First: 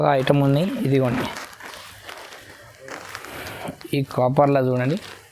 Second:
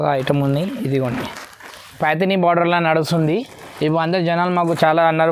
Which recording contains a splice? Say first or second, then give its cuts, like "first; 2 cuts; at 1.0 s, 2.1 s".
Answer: second; 1 cut; at 2.0 s